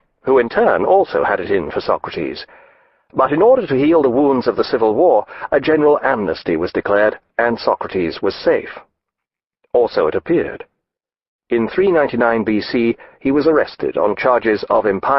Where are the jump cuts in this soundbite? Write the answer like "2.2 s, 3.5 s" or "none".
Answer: 13.9 s